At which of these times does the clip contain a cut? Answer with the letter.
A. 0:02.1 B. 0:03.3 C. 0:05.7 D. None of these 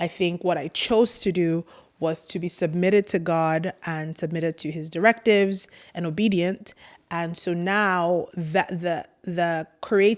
D